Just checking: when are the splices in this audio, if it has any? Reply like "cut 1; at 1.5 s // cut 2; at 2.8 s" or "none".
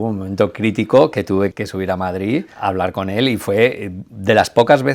cut 1; at 1.5 s // cut 2; at 2.5 s